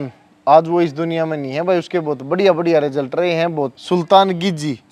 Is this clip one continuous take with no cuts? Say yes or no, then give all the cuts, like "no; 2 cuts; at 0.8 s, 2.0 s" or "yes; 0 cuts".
no; 1 cut; at 3.8 s